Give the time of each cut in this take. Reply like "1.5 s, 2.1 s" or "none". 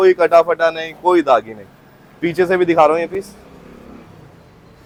none